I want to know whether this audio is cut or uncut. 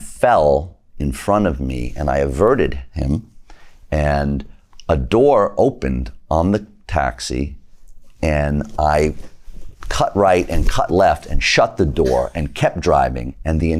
uncut